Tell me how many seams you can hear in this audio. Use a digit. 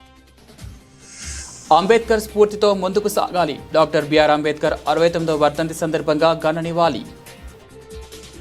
0